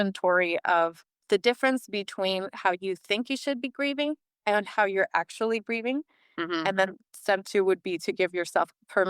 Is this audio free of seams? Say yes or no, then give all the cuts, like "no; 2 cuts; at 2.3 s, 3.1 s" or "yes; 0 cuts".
no; 1 cut; at 1.1 s